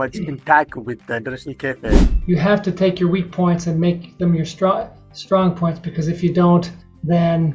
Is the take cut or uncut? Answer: cut